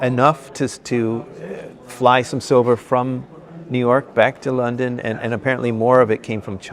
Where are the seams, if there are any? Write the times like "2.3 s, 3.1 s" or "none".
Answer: none